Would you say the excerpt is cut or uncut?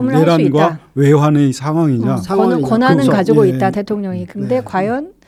uncut